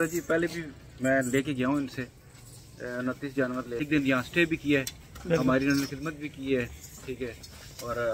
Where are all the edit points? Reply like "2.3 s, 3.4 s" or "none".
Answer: 3.8 s

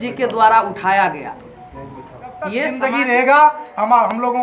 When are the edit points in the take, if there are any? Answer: 2.7 s

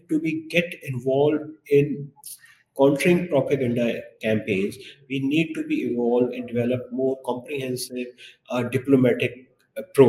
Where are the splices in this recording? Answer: none

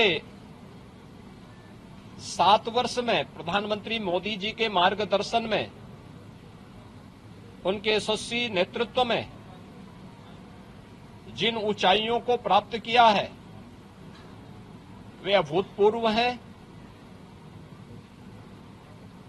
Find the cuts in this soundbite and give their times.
none

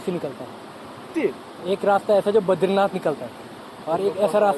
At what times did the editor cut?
1.1 s

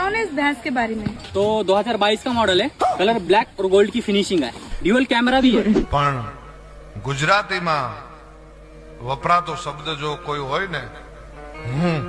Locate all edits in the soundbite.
1.2 s, 5.8 s

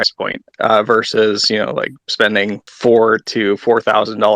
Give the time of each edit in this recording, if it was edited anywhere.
2.6 s

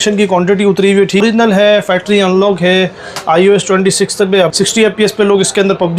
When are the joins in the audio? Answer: 1.2 s, 4.5 s

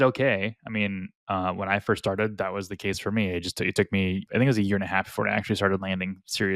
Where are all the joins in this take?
4.2 s

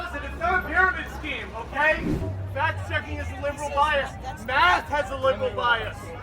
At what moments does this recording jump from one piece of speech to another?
2.2 s

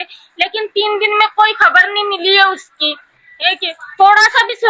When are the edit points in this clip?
none

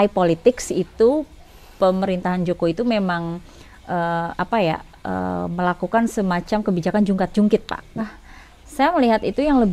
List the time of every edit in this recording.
8.0 s

